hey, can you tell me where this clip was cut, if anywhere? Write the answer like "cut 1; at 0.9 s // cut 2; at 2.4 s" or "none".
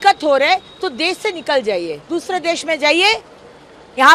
none